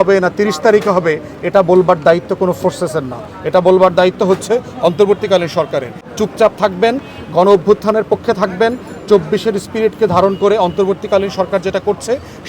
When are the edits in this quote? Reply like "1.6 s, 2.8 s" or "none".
6.0 s